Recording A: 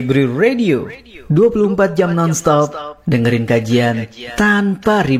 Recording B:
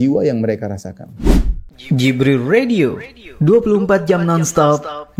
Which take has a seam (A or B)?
B